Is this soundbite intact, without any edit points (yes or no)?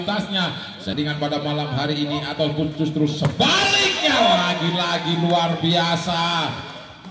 no